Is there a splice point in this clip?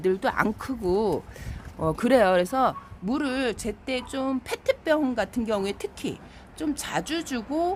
no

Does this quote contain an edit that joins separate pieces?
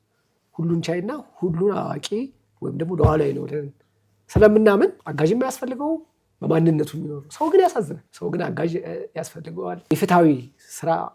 yes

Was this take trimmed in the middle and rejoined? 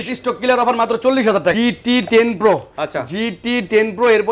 yes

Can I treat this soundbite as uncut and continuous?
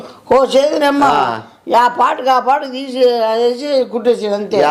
yes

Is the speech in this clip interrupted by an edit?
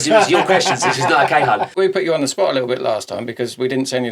yes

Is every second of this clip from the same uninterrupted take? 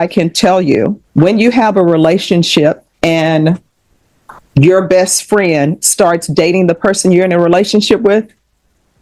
no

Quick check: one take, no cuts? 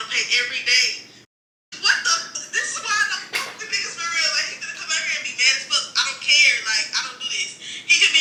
yes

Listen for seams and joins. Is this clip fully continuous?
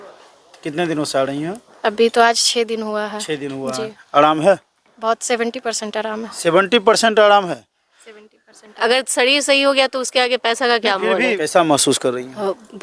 no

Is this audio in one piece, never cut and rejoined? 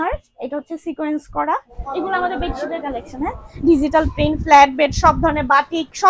no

